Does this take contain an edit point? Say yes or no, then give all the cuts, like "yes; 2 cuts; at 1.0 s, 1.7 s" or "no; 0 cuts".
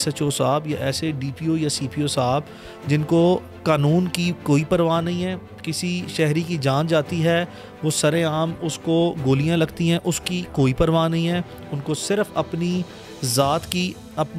no; 0 cuts